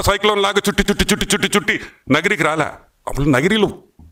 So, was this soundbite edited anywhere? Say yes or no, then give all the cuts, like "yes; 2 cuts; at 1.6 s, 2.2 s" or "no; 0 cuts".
no; 0 cuts